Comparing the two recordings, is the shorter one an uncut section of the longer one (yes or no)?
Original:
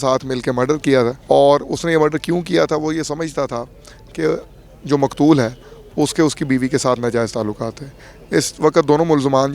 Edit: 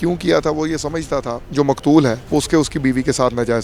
no